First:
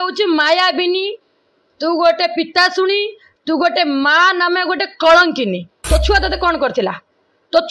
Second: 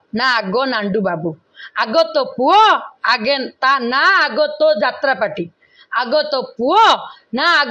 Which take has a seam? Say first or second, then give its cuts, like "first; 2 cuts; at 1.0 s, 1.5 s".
first; 1 cut; at 5.7 s